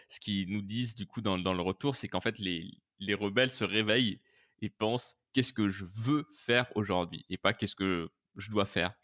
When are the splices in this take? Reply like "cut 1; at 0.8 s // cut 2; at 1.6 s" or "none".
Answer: none